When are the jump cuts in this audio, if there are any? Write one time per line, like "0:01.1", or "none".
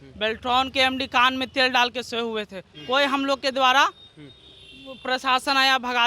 none